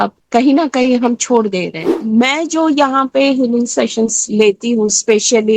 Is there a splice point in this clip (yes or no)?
yes